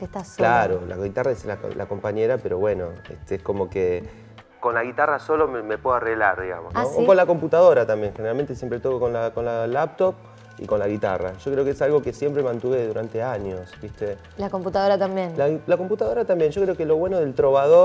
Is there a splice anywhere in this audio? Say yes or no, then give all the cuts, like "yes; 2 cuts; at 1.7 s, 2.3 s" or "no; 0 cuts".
yes; 1 cut; at 12.5 s